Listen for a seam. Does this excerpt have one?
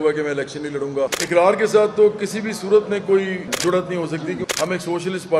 yes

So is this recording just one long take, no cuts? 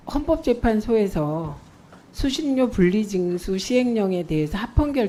yes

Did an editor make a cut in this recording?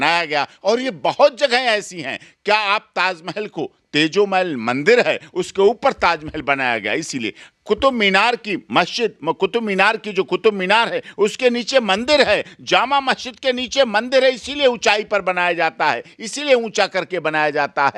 no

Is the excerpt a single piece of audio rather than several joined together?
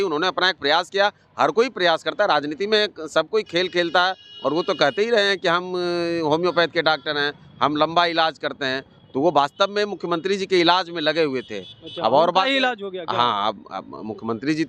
yes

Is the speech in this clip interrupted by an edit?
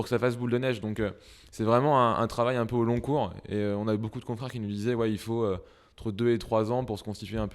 no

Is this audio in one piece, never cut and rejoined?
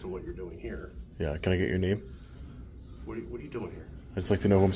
yes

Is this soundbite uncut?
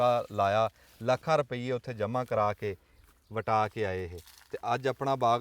yes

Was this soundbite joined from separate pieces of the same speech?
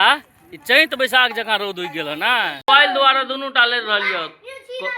yes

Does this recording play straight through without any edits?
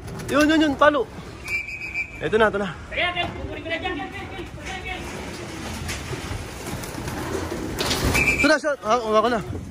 yes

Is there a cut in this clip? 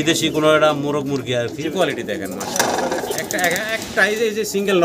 yes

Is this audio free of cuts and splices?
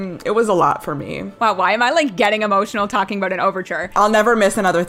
no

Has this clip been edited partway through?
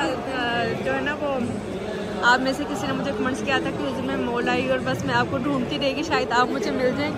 no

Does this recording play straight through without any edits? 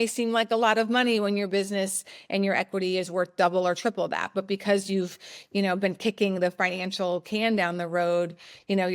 yes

